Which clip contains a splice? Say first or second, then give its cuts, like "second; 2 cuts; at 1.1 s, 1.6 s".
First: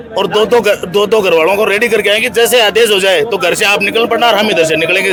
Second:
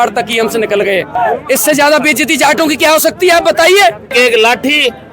second; 2 cuts; at 1.1 s, 4.1 s